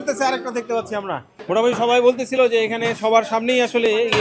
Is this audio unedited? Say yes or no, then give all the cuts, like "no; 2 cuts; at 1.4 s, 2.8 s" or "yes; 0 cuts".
yes; 0 cuts